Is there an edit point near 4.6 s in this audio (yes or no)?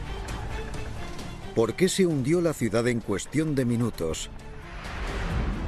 yes